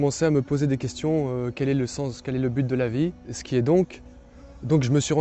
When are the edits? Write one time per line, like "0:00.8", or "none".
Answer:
0:03.4